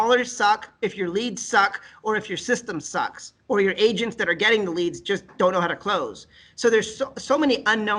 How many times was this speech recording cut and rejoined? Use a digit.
0